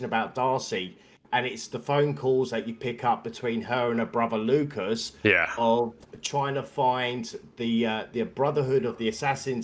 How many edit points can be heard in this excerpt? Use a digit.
0